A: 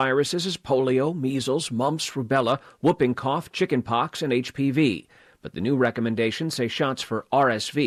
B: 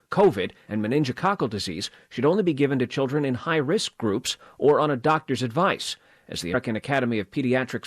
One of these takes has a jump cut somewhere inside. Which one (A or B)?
B